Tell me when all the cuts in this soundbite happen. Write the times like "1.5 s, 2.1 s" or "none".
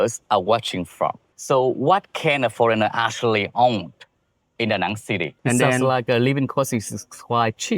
1.3 s, 5.3 s